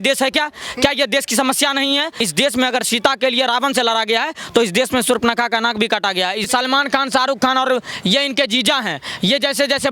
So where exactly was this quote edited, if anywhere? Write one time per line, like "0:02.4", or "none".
0:02.3
0:06.5